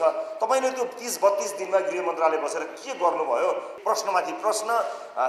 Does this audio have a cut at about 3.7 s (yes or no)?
yes